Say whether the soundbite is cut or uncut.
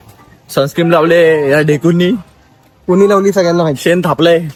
uncut